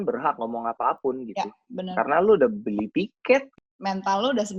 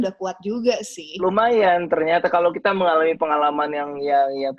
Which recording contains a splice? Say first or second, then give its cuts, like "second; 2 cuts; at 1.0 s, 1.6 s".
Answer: first; 1 cut; at 3.5 s